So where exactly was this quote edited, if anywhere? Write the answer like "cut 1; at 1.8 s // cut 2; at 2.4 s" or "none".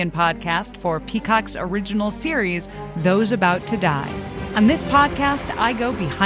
cut 1; at 4.4 s